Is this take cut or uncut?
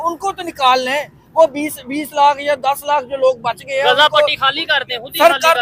uncut